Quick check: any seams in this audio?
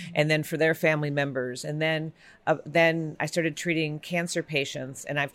no; 0 cuts

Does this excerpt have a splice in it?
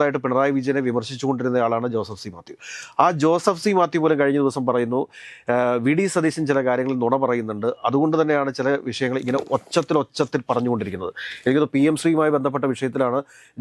no; 0 cuts

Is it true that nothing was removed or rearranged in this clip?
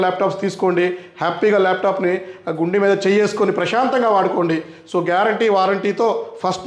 yes; 0 cuts

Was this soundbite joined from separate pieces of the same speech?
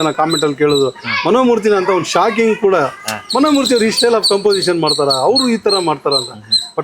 no; 0 cuts

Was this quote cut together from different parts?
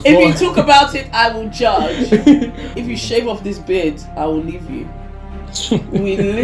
yes; 1 cut; at 2.7 s

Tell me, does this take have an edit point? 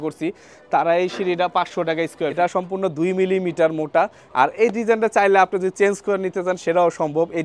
yes; 1 cut; at 2.3 s

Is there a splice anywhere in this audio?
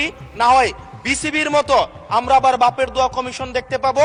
no; 0 cuts

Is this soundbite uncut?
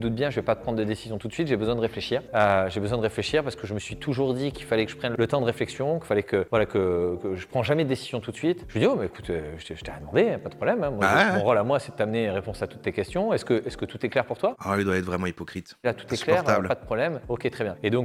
yes; 0 cuts

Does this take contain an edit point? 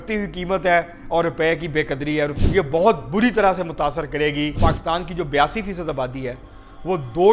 yes; 2 cuts; at 2.3 s, 4.6 s

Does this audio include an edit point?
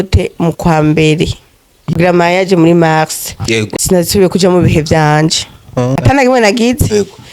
yes; 3 cuts; at 1.9 s, 3.7 s, 6.0 s

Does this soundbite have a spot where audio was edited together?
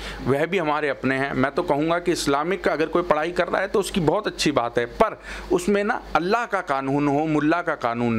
no; 0 cuts

